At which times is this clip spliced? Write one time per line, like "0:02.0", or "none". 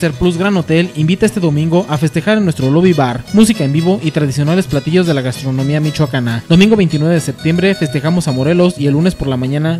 none